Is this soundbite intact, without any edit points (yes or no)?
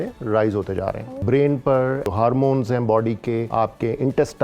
no